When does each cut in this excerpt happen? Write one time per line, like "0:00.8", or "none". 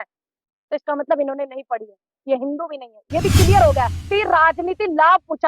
0:04.0